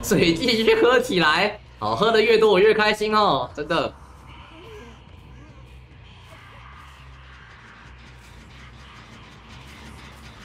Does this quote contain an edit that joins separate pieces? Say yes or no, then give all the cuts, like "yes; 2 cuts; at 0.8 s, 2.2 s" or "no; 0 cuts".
no; 0 cuts